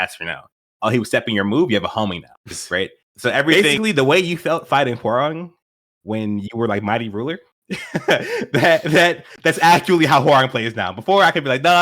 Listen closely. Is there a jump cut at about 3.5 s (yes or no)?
yes